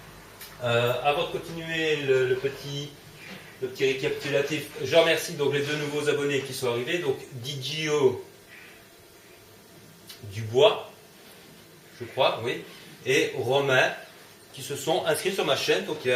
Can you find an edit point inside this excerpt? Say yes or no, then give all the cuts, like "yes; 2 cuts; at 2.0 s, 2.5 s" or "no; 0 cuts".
no; 0 cuts